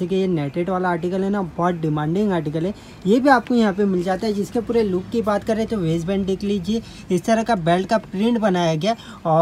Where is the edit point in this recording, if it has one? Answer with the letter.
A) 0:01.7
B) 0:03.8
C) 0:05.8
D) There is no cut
D